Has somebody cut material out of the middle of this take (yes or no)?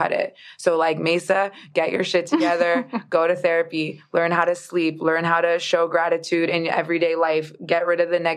no